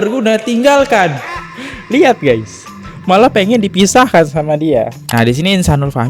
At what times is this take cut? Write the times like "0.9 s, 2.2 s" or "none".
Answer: 5.0 s

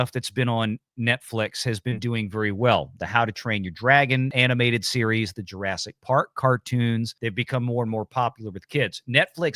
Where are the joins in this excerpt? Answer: 7.1 s

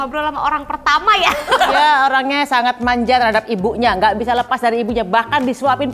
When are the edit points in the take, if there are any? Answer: 1.5 s

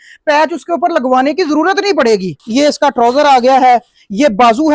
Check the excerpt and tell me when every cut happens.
2.4 s

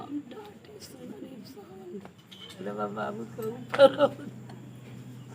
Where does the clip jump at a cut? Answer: 2.6 s

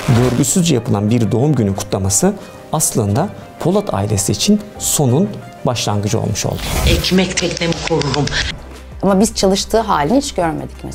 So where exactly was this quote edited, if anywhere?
6.7 s, 8.4 s

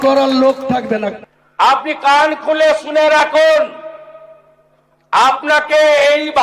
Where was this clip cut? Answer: 1.2 s

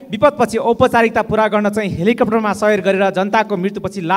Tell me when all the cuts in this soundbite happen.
none

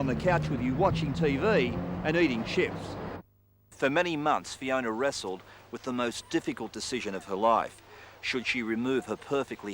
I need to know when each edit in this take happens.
3.3 s

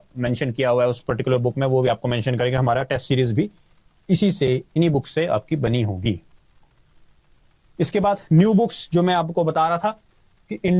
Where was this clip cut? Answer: none

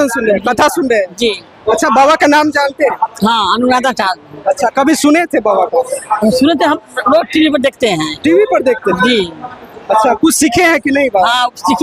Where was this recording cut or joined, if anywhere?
none

